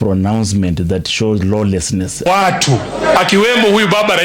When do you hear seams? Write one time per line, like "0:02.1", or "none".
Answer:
0:02.3